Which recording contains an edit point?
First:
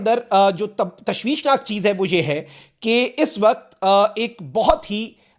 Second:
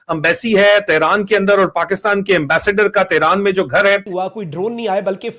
second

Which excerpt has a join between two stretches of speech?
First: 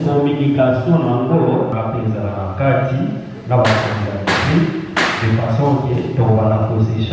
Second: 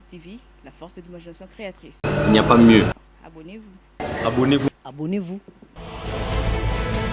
first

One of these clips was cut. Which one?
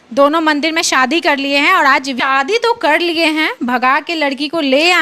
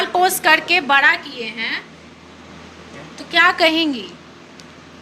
first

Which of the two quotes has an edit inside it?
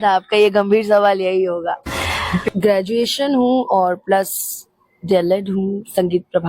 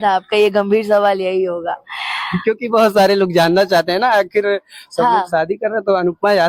first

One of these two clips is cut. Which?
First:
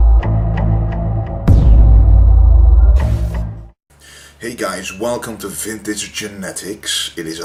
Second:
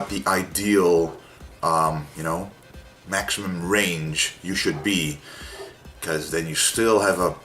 second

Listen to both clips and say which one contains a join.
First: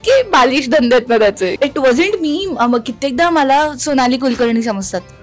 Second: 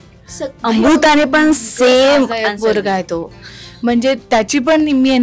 first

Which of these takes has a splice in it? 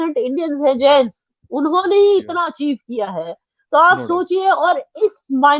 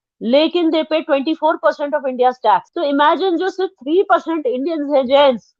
second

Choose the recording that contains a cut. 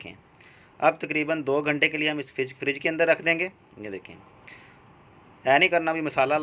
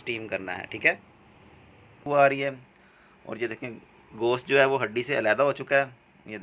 second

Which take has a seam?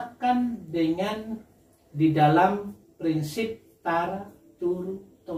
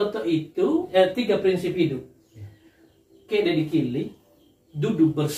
second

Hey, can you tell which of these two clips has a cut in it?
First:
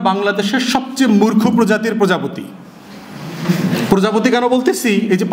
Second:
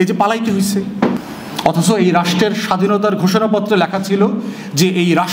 second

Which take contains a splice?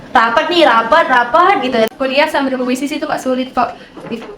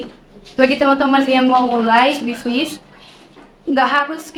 first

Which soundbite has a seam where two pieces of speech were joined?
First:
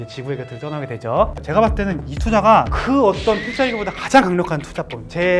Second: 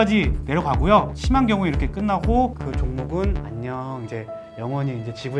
first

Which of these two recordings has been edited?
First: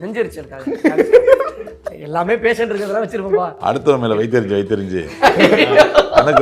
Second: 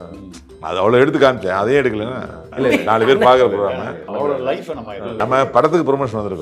second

